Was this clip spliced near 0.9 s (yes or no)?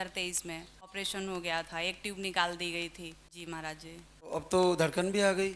yes